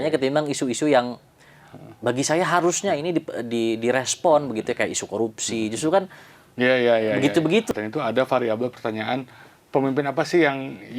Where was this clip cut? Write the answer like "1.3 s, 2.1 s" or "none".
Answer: 7.7 s

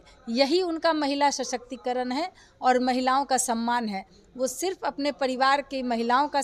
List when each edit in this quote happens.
none

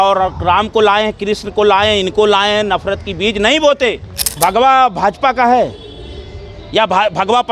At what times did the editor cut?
4.3 s

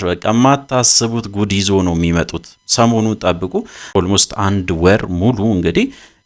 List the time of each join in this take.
3.9 s

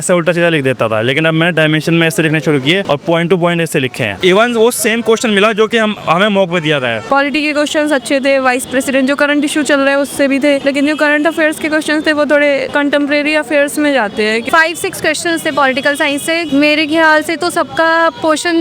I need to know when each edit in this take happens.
2.8 s, 4.1 s, 7.0 s, 10.6 s, 12.7 s, 14.4 s, 16.4 s

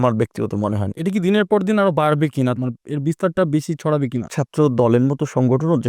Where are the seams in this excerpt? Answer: 0.8 s, 2.6 s, 4.4 s

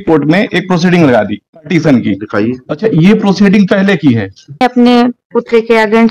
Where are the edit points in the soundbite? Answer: 4.6 s

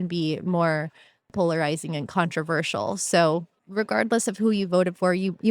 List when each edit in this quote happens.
1.3 s, 3.6 s

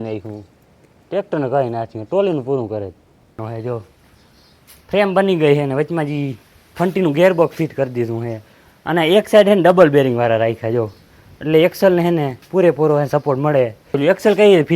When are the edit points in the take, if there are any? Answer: 3.4 s, 14.0 s

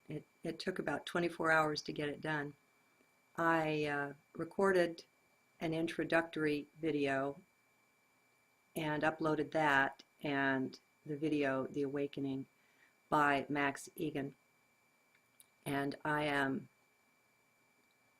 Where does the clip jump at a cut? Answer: 10.9 s

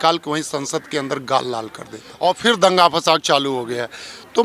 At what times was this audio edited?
2.0 s

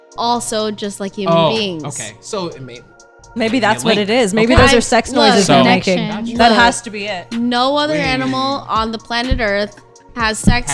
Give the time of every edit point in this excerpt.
none

